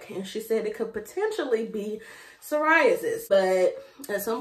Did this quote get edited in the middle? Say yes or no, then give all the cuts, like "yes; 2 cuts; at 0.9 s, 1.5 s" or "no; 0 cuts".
yes; 1 cut; at 3.2 s